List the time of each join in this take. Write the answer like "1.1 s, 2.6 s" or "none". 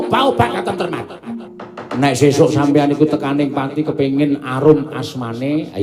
1.4 s